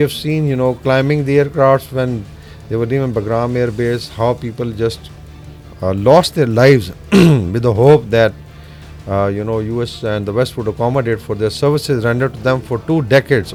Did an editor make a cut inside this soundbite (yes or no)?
no